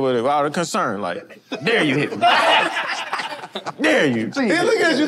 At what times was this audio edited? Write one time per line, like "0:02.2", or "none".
none